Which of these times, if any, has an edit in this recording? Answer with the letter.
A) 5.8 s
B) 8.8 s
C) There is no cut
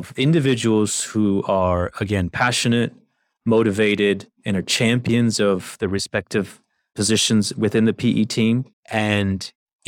B